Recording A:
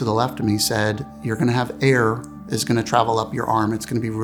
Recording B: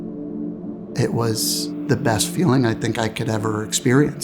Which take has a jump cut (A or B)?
B